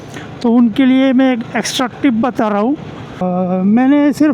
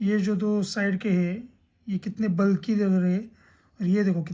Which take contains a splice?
first; 1 cut; at 3.2 s

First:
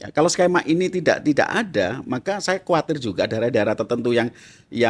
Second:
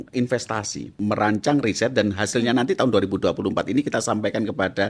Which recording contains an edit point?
second; 1 cut; at 0.9 s

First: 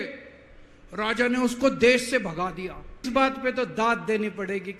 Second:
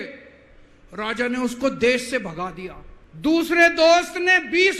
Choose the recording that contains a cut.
first; 1 cut; at 3.1 s

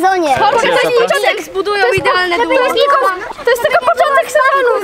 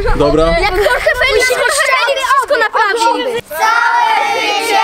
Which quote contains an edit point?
second; 1 cut; at 3.4 s

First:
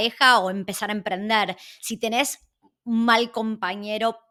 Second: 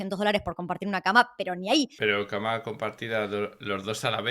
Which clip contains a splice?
second; 1 cut; at 1.9 s

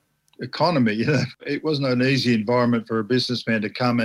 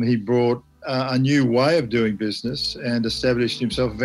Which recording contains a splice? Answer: first; 1 cut; at 1.4 s

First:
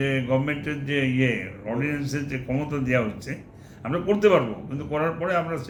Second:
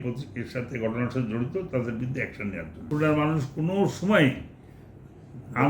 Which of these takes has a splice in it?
second; 1 cut; at 2.9 s

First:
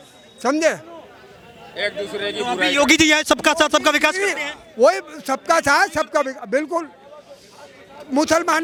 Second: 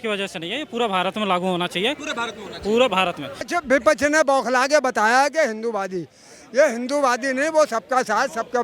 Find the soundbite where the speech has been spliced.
second; 1 cut; at 3.4 s

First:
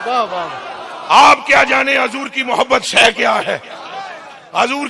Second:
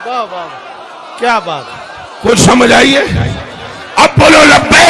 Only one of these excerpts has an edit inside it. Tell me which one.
first; 1 cut; at 1.0 s

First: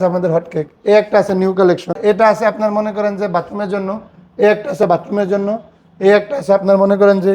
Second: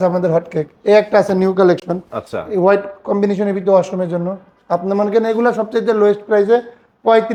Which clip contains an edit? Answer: first; 1 cut; at 2.0 s

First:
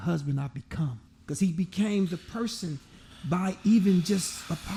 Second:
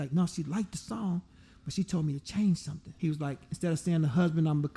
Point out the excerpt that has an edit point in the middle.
second; 1 cut; at 2.9 s

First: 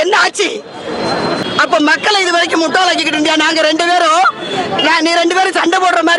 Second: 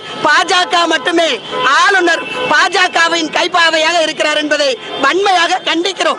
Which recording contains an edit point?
first; 1 cut; at 1.4 s

